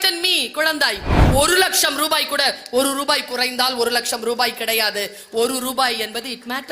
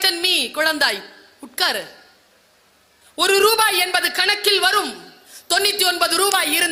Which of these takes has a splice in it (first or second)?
first